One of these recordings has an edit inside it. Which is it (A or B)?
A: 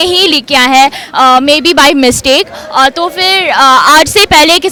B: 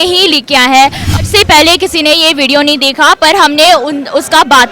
B